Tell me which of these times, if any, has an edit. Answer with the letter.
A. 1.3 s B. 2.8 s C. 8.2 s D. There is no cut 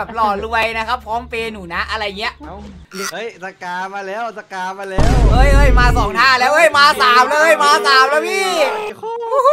B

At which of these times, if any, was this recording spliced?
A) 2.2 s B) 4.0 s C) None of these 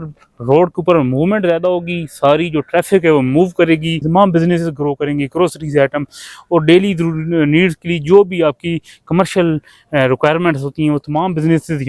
B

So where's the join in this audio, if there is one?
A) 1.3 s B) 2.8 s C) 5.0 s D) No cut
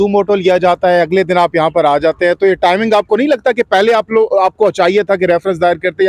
D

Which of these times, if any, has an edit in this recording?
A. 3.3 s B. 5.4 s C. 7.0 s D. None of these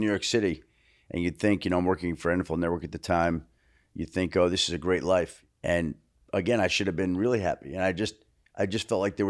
B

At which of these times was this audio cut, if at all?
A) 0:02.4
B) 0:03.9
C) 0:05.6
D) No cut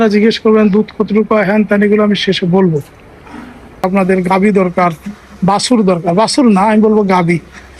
B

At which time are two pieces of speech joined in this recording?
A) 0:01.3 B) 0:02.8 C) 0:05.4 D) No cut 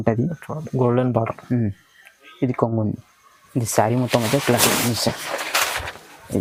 D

